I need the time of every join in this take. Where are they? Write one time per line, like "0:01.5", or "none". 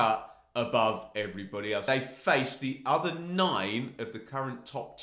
0:01.8